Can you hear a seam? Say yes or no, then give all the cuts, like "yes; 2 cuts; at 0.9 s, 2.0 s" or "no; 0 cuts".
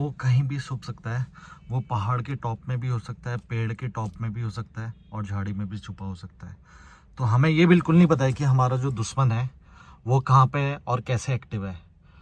no; 0 cuts